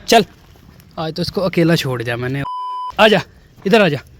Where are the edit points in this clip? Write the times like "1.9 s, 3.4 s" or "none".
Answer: 2.6 s

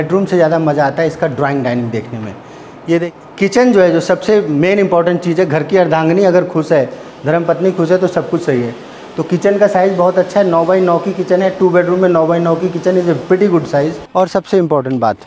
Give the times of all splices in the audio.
3.1 s, 14.0 s

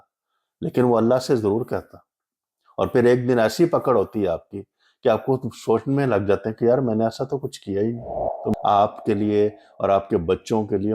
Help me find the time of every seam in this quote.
8.5 s

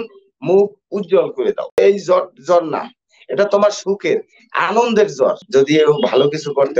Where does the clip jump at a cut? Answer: 1.8 s, 5.4 s

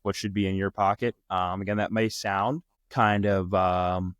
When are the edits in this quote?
2.7 s

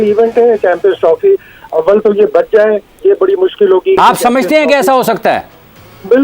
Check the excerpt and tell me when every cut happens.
4.0 s

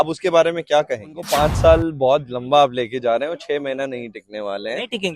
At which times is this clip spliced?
1.2 s

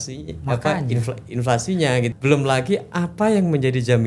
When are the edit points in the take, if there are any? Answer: 2.1 s

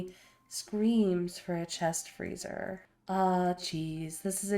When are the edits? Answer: 2.9 s

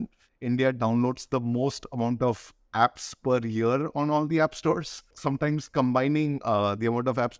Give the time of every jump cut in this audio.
5.1 s

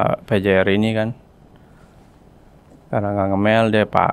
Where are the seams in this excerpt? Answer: none

